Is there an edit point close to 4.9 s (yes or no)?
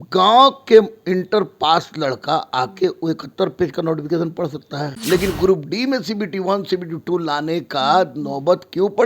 yes